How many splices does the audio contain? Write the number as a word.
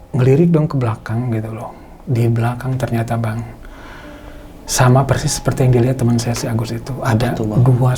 zero